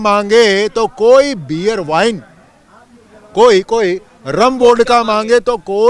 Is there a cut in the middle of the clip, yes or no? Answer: no